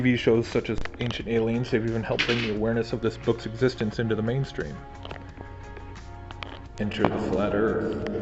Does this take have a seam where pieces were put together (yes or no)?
no